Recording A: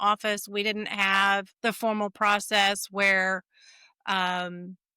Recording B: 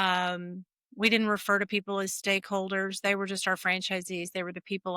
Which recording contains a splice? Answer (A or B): A